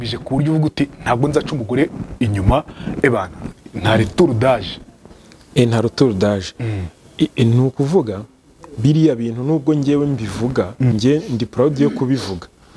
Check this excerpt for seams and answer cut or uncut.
uncut